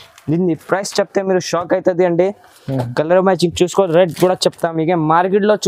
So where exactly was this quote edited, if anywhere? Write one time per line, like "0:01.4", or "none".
none